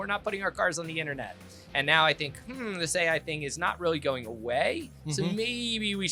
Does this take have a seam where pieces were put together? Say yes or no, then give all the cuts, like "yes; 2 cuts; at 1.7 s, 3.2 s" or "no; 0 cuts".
no; 0 cuts